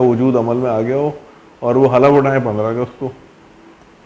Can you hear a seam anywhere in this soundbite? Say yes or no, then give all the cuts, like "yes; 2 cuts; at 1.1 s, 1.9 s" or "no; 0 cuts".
no; 0 cuts